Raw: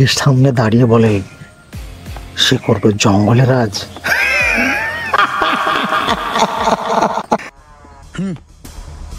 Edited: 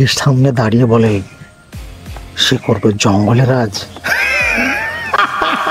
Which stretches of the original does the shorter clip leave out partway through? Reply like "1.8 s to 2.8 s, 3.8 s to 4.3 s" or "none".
none